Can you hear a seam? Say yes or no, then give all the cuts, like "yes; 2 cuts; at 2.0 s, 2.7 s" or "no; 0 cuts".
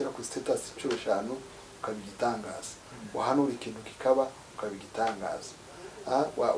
no; 0 cuts